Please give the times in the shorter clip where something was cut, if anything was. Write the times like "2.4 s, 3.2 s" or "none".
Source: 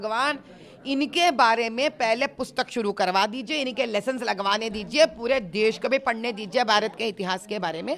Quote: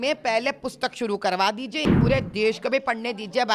1.9 s